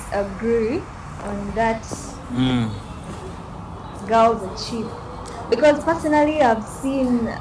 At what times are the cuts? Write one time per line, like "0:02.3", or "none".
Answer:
none